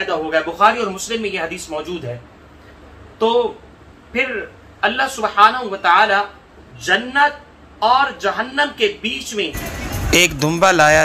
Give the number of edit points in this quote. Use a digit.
1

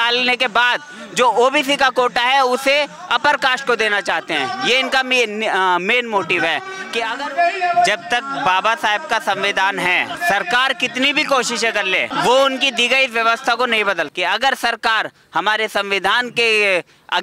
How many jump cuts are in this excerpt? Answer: 4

